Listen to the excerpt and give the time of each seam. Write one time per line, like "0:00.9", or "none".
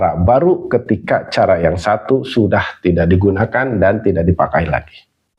none